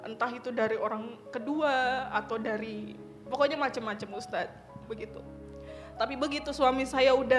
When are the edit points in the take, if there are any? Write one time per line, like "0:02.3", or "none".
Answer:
0:04.8